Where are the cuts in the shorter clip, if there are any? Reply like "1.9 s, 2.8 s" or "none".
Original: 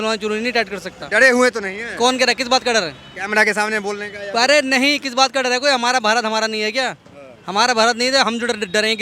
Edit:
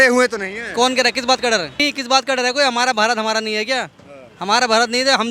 1.8 s